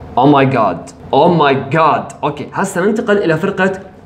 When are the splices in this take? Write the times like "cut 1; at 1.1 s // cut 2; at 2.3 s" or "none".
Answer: cut 1; at 0.9 s